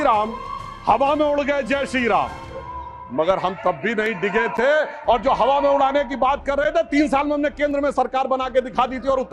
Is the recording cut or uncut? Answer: uncut